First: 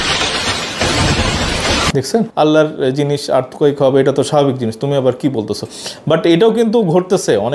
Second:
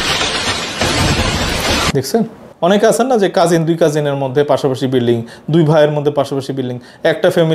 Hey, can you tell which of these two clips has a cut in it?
first; 1 cut; at 2.3 s

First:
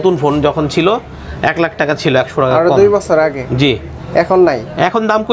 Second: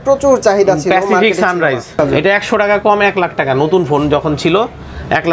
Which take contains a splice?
second; 1 cut; at 1.9 s

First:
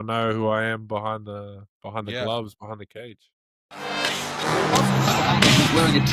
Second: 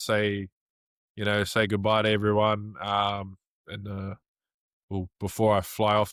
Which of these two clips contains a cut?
first; 1 cut; at 3.9 s

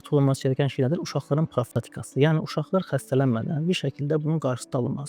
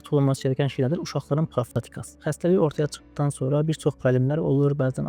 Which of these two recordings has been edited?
second; 1 cut; at 2.0 s

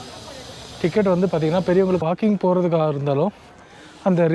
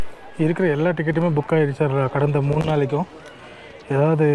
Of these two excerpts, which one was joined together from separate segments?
first; 1 cut; at 2.0 s

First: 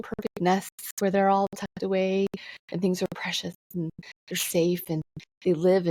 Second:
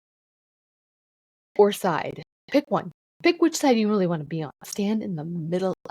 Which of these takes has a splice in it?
second; 2 cuts; at 2.3 s, 3.0 s

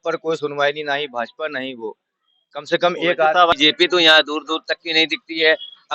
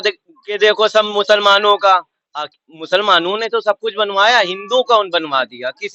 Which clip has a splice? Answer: first; 1 cut; at 3.6 s

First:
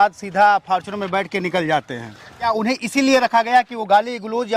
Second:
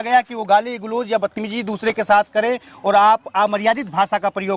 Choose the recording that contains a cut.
first; 1 cut; at 2.5 s

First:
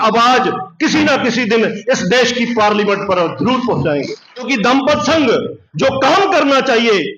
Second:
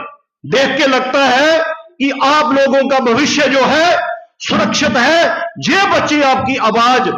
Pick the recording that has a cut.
first; 1 cut; at 4.5 s

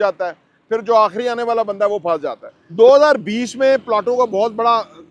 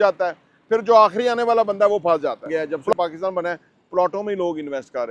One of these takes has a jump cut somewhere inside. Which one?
second; 1 cut; at 2.6 s

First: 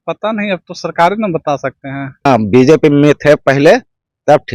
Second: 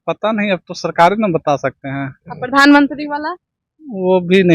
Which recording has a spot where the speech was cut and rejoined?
first; 1 cut; at 2.3 s

